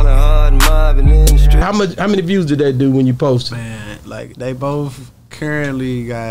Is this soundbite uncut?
no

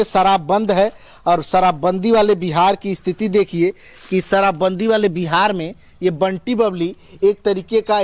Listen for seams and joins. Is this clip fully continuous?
yes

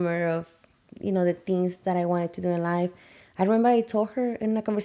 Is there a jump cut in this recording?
no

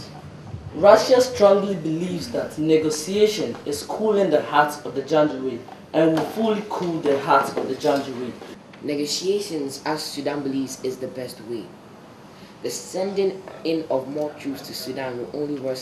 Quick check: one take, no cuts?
no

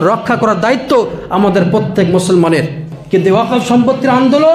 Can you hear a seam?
yes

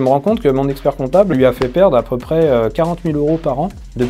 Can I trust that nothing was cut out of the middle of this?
no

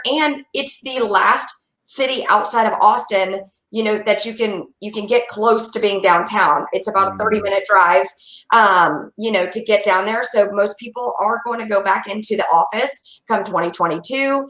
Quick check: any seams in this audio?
no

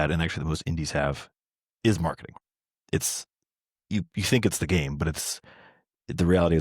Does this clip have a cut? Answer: yes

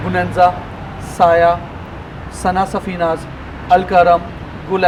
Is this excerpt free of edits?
yes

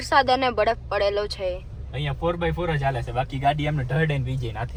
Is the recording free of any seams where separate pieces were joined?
yes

